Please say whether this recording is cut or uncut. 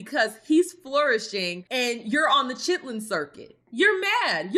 uncut